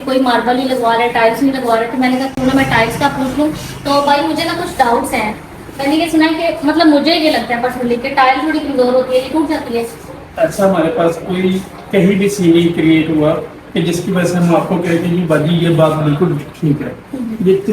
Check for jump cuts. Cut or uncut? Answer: uncut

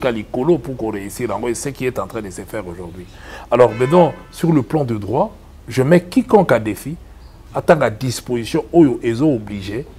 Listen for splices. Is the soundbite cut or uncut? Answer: uncut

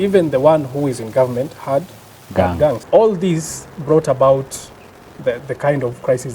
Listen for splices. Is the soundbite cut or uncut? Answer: cut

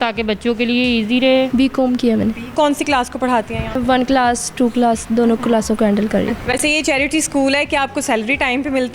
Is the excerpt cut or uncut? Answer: cut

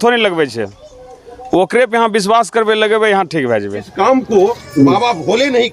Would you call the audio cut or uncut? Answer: cut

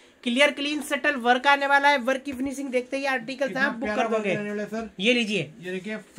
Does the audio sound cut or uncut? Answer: uncut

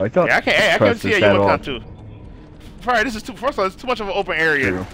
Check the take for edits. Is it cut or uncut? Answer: uncut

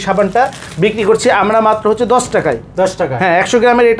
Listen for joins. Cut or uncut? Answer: uncut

